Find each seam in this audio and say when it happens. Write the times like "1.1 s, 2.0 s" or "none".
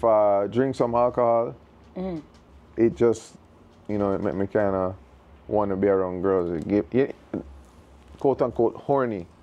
none